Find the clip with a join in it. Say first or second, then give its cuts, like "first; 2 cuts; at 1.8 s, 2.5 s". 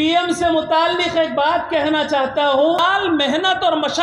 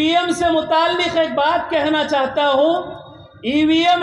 first; 1 cut; at 2.8 s